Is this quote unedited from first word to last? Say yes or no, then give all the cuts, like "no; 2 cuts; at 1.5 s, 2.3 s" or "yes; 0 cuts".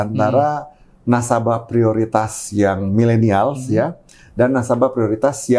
yes; 0 cuts